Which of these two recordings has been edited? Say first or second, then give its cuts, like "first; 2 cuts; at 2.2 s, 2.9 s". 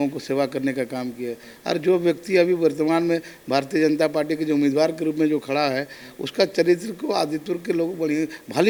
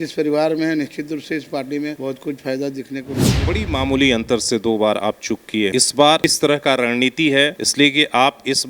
second; 3 cuts; at 3.4 s, 6.0 s, 7.6 s